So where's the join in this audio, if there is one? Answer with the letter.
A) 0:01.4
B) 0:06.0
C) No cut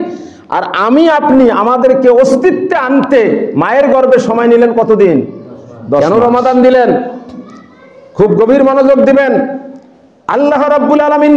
B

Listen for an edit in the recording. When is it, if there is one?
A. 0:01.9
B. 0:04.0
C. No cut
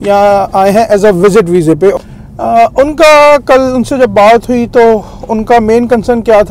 A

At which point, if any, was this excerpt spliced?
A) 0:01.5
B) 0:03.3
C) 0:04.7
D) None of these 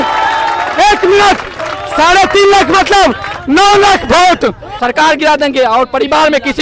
C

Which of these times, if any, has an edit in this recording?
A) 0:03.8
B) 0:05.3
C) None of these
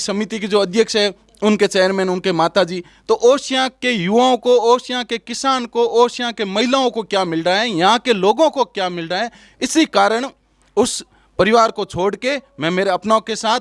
C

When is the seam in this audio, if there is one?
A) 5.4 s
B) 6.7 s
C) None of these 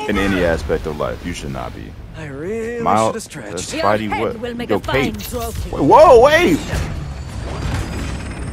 B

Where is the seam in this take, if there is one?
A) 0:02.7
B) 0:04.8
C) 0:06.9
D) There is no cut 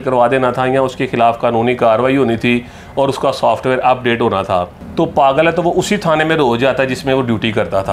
B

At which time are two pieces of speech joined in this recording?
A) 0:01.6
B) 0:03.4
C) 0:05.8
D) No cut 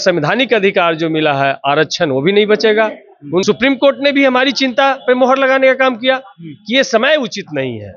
B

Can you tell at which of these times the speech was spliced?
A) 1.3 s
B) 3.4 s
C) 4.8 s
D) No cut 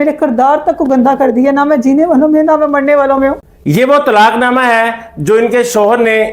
B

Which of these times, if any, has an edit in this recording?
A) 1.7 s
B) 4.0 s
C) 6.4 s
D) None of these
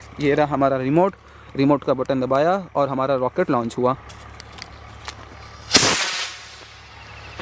B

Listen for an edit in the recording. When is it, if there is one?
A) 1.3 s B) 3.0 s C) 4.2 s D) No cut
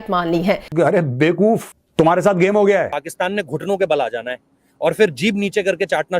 B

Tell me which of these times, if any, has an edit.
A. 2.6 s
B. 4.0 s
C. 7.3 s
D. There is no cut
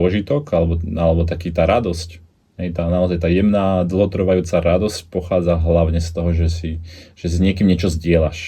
D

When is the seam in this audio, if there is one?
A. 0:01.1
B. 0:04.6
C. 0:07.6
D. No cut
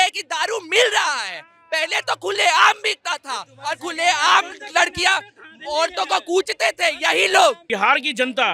C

